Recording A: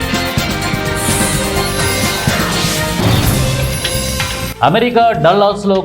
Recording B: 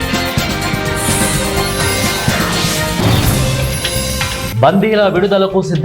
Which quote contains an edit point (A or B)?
B